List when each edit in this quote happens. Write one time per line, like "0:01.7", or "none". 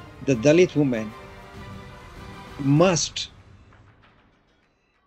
0:01.1
0:02.5
0:03.2